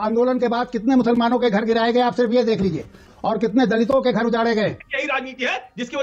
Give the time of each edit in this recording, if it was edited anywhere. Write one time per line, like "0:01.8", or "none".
0:03.1
0:04.9